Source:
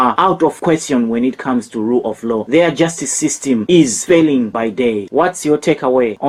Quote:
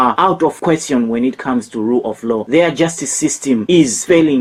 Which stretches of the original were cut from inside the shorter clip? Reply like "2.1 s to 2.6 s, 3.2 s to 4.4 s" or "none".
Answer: none